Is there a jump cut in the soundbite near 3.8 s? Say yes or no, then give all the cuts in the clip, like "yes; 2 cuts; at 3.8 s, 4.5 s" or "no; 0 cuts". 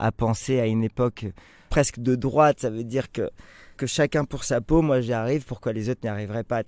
yes; 1 cut; at 3.8 s